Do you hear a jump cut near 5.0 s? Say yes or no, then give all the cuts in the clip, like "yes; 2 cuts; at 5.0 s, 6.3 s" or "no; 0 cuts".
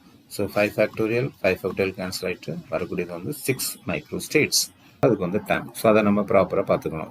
yes; 1 cut; at 5.0 s